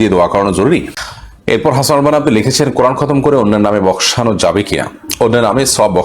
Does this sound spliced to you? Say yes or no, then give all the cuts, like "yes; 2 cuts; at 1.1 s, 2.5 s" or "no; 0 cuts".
yes; 1 cut; at 0.9 s